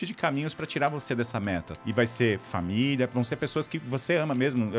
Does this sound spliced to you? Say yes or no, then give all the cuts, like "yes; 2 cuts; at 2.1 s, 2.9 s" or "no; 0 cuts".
yes; 1 cut; at 1.7 s